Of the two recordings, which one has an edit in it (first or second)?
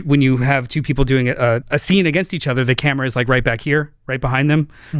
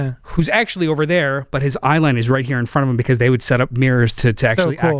first